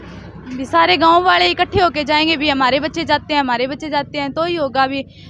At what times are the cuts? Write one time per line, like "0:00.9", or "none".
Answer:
none